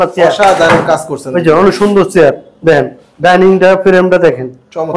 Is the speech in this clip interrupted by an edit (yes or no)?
no